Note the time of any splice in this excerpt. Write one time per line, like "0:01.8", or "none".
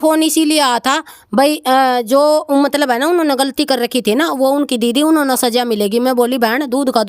none